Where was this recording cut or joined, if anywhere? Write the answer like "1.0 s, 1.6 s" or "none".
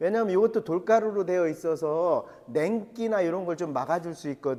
none